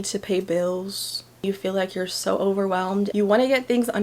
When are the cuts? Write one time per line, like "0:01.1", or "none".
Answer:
0:01.4
0:03.1